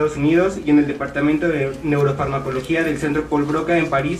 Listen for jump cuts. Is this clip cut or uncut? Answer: uncut